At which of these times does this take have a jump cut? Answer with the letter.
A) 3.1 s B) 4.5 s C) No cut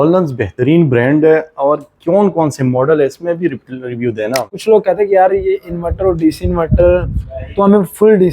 B